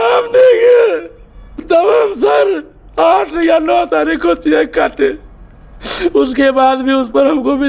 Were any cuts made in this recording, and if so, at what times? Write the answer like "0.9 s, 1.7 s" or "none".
1.6 s